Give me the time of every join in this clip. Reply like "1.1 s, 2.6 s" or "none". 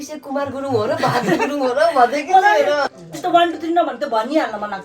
2.9 s